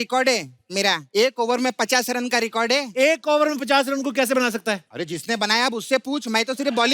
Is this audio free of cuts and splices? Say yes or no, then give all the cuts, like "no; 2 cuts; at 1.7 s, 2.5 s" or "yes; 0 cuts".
no; 2 cuts; at 1.0 s, 4.9 s